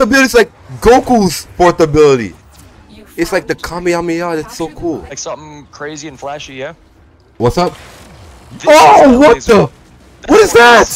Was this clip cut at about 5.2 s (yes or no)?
yes